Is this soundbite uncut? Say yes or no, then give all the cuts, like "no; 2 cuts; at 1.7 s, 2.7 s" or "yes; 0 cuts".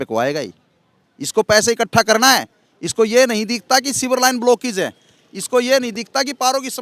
yes; 0 cuts